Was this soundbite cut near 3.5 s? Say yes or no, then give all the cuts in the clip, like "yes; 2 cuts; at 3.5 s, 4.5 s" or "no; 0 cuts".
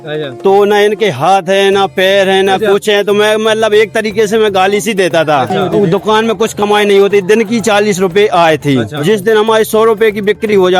no; 2 cuts; at 5.6 s, 8.9 s